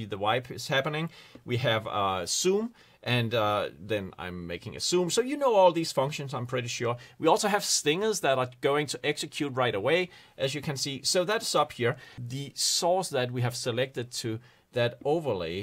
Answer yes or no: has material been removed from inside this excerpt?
yes